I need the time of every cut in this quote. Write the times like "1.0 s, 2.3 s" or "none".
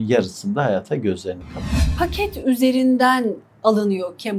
1.8 s